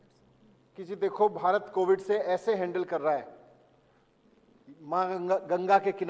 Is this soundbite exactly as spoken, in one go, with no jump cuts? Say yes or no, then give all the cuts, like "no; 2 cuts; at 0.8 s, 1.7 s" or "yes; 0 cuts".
yes; 0 cuts